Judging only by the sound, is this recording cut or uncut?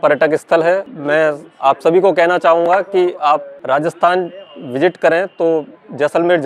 cut